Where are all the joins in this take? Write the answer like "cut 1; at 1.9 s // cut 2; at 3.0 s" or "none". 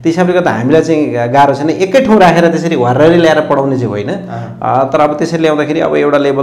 none